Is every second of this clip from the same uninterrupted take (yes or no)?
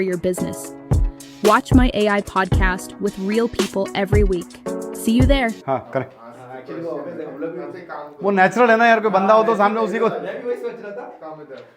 no